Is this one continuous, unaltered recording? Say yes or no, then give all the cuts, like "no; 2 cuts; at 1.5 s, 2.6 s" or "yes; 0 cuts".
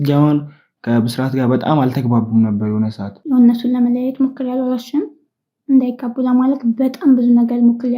no; 1 cut; at 3.1 s